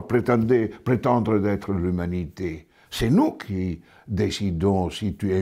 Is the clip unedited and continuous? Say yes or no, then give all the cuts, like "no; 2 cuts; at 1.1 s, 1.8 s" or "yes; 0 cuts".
yes; 0 cuts